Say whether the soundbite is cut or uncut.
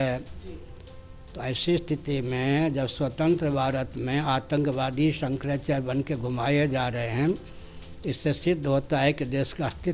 uncut